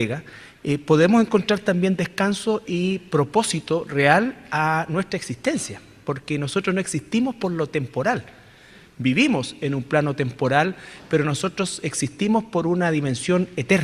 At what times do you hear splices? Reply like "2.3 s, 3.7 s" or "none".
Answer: none